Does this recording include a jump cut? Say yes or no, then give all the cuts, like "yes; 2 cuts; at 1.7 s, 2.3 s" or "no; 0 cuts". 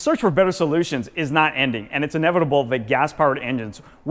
no; 0 cuts